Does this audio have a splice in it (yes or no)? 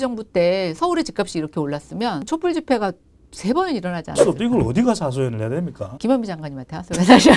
yes